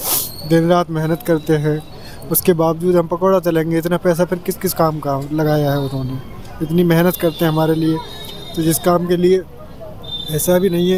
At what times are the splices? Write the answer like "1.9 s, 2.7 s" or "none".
none

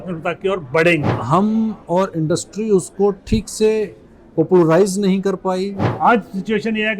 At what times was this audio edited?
1.2 s, 5.8 s

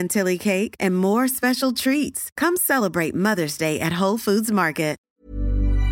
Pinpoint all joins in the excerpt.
5.0 s

